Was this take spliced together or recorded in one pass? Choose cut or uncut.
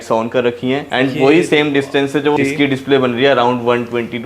cut